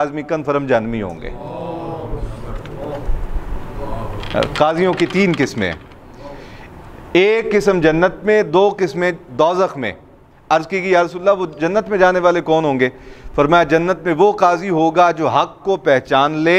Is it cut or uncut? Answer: uncut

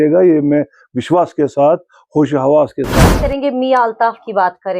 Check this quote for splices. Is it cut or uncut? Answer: cut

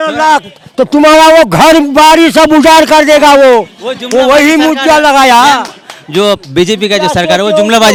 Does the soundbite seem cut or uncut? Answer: uncut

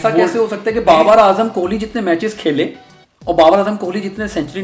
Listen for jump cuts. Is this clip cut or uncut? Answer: uncut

